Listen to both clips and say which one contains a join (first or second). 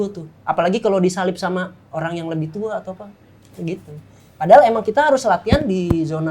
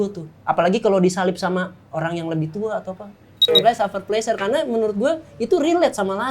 second